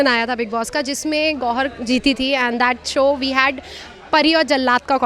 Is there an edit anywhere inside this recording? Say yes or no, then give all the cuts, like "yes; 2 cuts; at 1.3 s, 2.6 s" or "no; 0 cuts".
no; 0 cuts